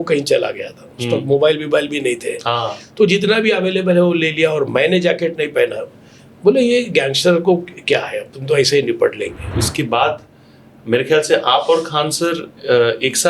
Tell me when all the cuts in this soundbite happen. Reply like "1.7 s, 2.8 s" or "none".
9.6 s